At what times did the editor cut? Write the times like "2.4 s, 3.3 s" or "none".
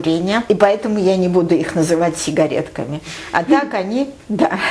none